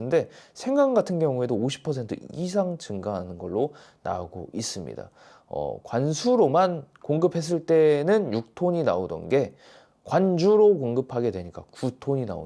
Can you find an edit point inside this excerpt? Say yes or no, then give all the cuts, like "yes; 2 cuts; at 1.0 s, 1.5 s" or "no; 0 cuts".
no; 0 cuts